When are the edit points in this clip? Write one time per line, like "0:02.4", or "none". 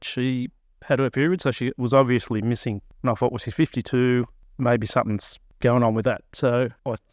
0:02.9
0:04.4
0:05.5

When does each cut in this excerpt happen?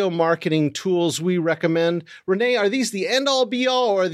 none

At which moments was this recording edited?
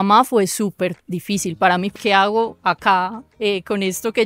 0:01.9

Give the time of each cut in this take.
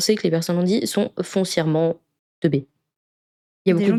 none

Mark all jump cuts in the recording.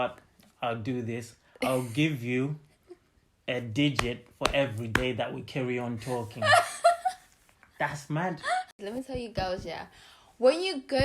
0:08.8

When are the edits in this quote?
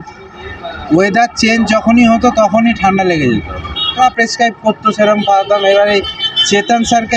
0:04.0

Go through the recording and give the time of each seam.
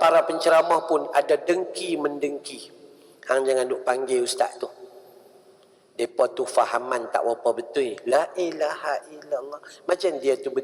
none

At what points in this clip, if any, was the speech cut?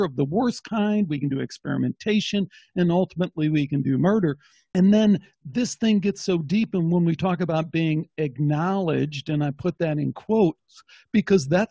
none

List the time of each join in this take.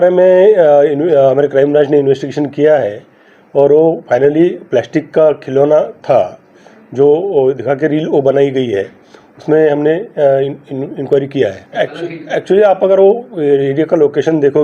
0:11.6

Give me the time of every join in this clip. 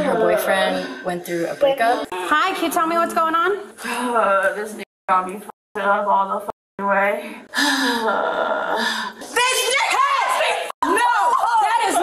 0:02.1
0:03.8
0:09.1

